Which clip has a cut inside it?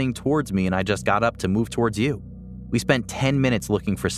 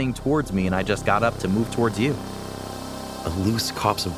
second; 1 cut; at 2.7 s

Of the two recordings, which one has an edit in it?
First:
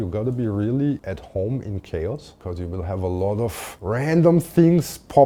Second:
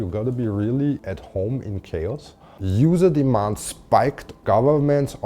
second; 2 cuts; at 2.5 s, 4.3 s

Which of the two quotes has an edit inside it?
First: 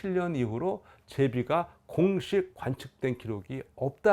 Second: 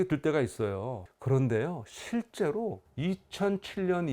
second; 1 cut; at 2.8 s

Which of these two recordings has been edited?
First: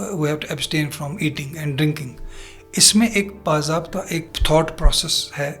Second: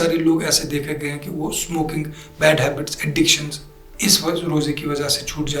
first; 1 cut; at 4.3 s

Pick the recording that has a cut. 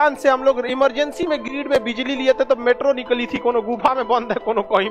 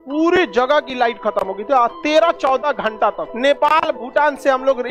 second; 1 cut; at 3.3 s

